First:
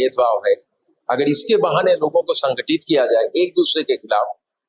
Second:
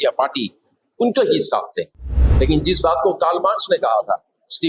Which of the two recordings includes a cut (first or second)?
second